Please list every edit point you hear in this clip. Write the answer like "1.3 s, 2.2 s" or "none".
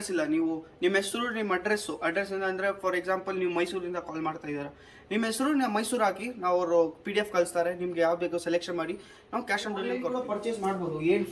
10.0 s